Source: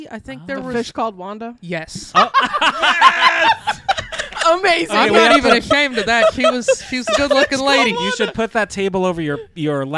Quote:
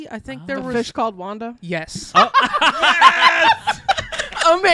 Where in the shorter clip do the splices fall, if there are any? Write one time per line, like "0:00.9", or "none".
none